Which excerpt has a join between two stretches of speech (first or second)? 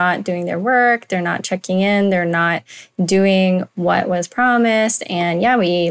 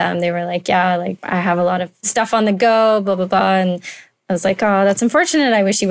second